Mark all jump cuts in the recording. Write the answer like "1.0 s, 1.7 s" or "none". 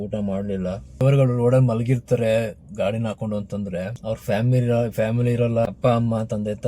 1.0 s, 4.0 s, 5.7 s